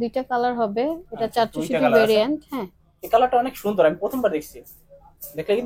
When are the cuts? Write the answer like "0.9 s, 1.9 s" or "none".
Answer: none